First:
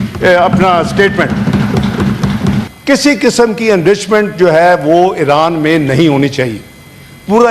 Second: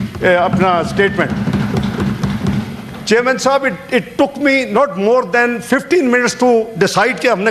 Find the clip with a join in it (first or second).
first